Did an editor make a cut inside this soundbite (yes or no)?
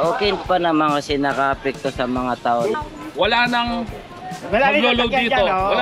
yes